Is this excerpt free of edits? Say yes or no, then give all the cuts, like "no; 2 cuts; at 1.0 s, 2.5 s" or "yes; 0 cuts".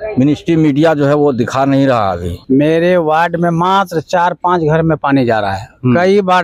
no; 1 cut; at 2.4 s